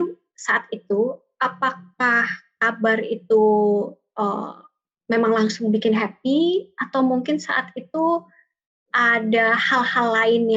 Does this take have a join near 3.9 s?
no; 0 cuts

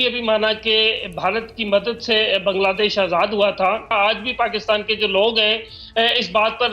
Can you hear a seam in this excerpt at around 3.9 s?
yes; 1 cut; at 3.9 s

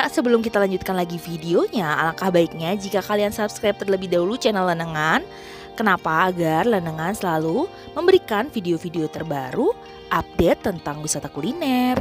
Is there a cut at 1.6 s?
no; 0 cuts

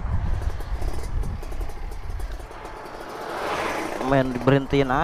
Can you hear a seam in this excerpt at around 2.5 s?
yes; 1 cut; at 2.5 s

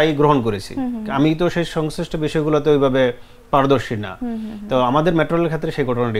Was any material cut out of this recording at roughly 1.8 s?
no; 0 cuts

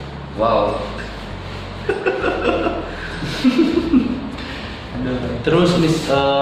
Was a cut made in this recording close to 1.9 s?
no; 0 cuts

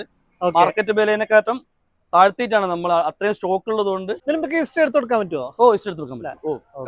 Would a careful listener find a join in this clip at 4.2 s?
yes; 1 cut; at 4.2 s

